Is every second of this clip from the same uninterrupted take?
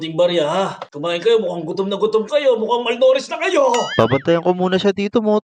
no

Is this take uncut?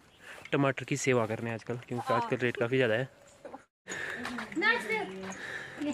no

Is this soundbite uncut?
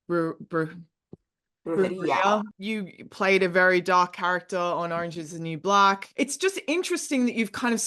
no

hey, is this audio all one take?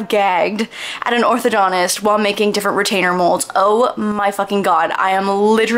yes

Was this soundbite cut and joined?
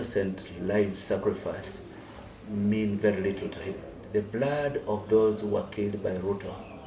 yes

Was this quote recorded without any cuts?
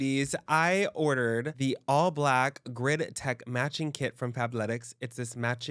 yes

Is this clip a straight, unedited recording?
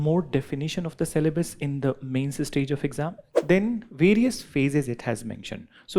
no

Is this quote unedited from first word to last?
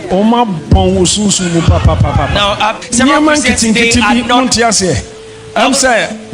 no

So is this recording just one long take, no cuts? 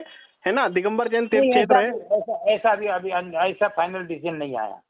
yes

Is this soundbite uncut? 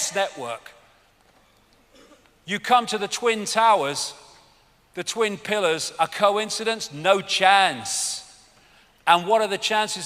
no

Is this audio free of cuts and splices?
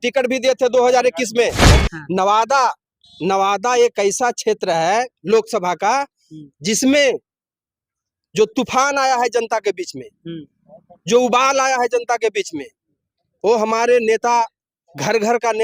no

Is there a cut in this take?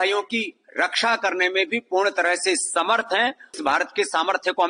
yes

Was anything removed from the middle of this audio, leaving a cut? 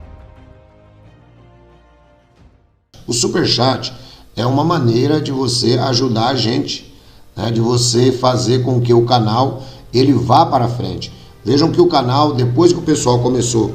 yes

